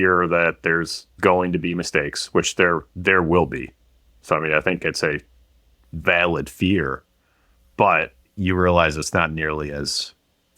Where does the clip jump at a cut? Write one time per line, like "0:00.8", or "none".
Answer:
none